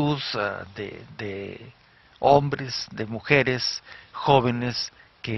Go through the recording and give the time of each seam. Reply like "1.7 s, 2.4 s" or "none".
4.4 s